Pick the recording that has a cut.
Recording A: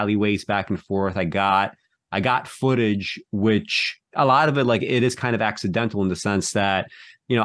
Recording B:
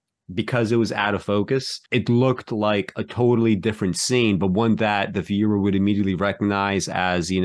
B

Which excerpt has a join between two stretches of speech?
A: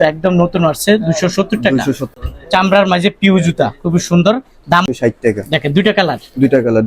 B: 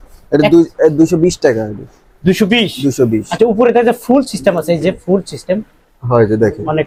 A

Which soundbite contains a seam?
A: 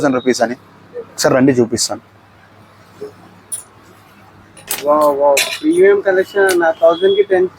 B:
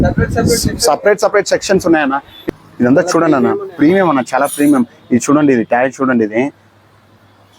B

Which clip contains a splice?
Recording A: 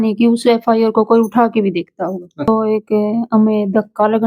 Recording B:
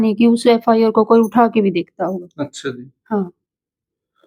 A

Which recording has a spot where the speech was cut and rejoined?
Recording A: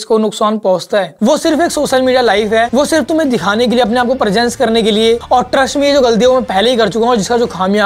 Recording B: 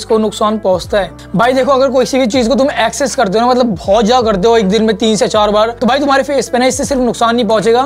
A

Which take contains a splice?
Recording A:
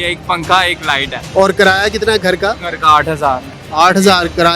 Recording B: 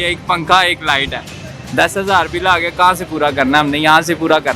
A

